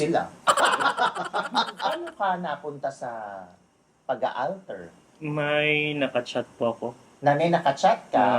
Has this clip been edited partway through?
yes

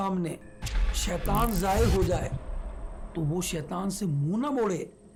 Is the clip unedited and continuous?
yes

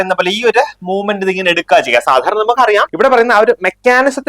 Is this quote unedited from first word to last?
no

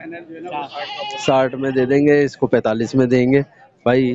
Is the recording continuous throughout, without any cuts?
yes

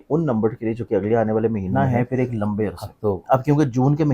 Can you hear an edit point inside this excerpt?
yes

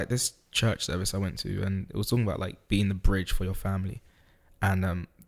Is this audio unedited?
yes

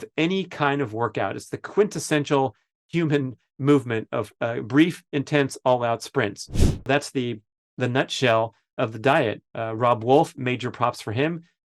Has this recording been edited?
yes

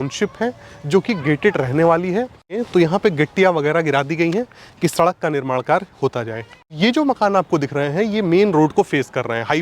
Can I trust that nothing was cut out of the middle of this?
no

